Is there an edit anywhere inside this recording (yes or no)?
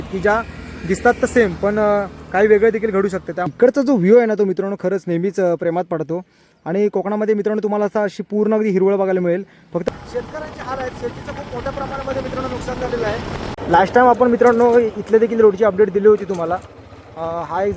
yes